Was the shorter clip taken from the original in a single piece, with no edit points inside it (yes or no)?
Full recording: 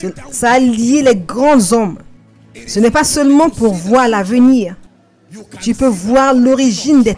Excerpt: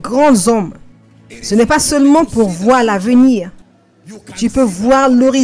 yes